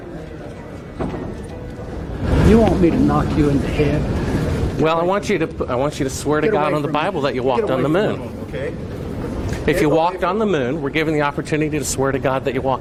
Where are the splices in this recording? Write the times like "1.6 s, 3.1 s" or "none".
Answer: none